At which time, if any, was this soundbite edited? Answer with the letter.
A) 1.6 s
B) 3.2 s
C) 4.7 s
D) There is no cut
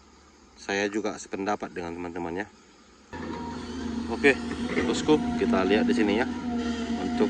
B